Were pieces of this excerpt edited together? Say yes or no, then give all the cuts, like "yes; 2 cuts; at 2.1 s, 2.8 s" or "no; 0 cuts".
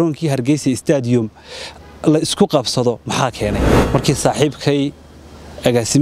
yes; 1 cut; at 3.7 s